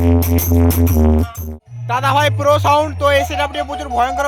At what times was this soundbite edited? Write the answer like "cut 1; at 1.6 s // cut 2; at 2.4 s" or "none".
cut 1; at 1.4 s